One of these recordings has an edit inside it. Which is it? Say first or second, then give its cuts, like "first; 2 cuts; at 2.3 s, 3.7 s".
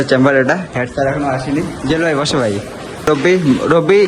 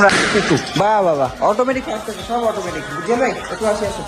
first; 1 cut; at 3.1 s